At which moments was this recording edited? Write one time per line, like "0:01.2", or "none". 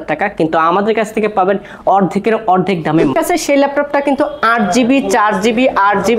0:03.1